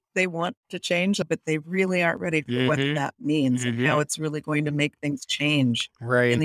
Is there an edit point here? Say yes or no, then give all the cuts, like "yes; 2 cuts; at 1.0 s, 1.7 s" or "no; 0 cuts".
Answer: yes; 1 cut; at 1.2 s